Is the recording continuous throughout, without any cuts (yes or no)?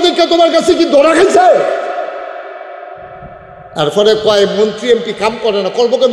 yes